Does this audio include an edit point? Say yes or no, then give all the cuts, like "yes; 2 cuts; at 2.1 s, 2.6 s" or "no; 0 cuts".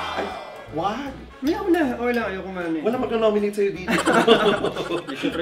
no; 0 cuts